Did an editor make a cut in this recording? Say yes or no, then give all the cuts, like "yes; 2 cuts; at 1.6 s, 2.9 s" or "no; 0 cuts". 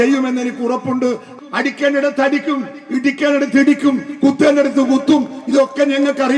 yes; 1 cut; at 1.3 s